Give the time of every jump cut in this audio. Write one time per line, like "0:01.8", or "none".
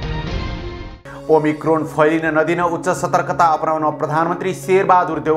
0:00.9